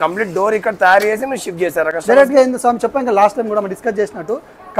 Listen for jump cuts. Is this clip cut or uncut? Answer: uncut